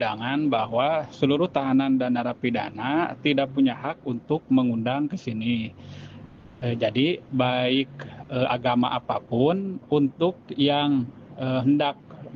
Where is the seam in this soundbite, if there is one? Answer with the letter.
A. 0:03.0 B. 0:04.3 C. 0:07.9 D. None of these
D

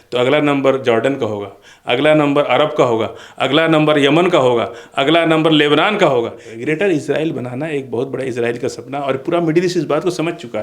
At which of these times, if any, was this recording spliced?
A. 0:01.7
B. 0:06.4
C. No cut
B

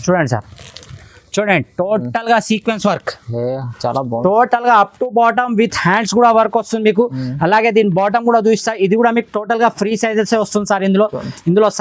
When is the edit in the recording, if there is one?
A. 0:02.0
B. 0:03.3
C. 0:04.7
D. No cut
D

